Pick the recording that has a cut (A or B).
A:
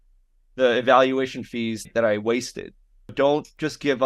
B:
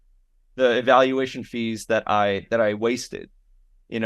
A